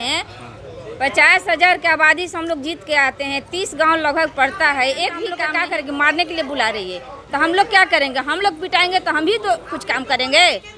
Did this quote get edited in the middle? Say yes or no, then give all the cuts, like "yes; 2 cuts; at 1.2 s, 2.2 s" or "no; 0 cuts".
yes; 1 cut; at 5.4 s